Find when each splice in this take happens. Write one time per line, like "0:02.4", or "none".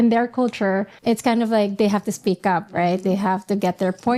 0:00.9